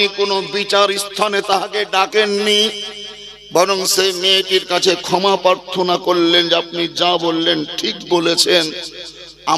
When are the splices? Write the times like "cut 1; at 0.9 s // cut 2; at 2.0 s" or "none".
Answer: none